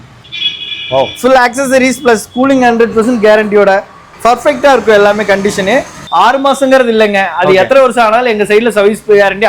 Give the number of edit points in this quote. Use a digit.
1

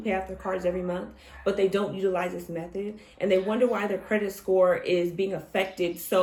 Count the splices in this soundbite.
0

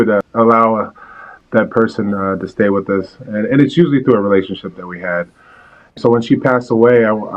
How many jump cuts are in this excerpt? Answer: 2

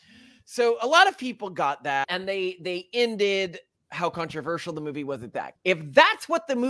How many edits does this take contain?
2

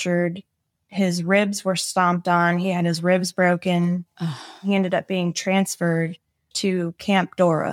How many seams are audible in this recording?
2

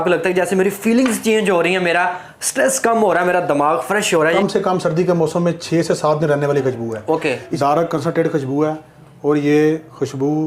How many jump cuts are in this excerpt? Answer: 2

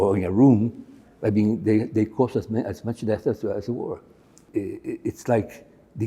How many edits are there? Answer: 1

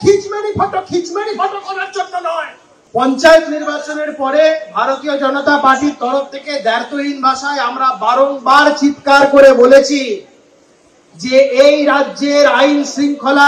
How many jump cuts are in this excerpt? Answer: 1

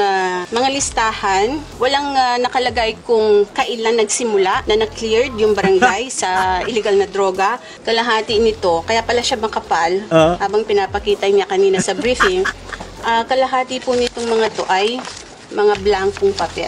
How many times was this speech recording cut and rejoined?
1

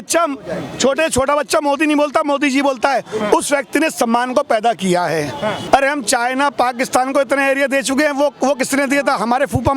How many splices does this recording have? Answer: 1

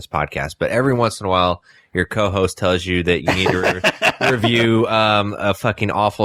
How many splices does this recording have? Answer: 0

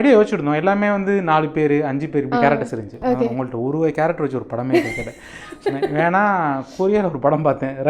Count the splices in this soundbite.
0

